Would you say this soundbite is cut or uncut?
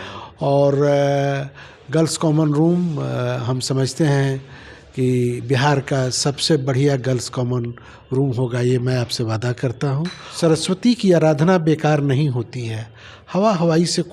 cut